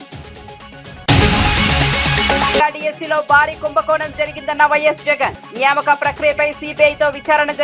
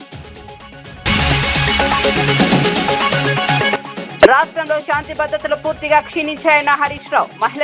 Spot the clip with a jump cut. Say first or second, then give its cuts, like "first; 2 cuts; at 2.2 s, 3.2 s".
second; 1 cut; at 1.0 s